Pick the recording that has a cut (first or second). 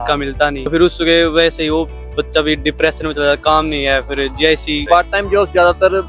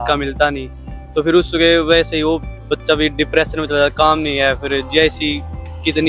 first